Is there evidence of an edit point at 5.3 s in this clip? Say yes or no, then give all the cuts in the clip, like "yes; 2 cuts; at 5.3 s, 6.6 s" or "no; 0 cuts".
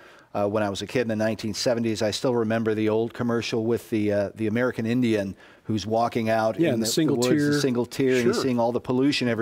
yes; 1 cut; at 5.3 s